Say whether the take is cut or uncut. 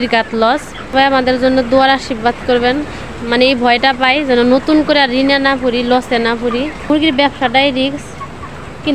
cut